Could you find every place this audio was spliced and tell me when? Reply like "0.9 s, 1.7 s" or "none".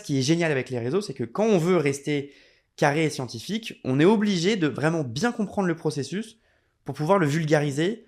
none